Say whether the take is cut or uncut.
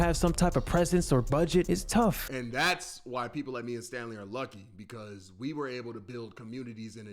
cut